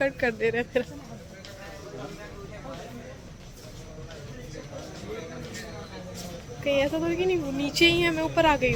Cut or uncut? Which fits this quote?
uncut